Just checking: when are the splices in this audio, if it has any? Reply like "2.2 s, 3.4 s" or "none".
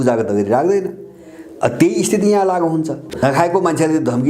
3.0 s